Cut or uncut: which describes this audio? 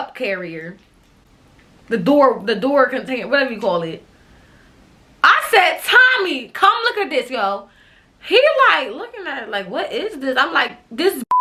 uncut